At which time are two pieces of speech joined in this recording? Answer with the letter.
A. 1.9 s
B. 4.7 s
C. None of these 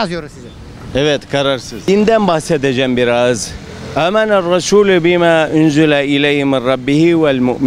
A